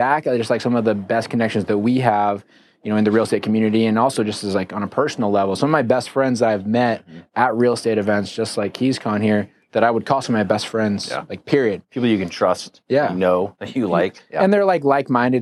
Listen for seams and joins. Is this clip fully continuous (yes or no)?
yes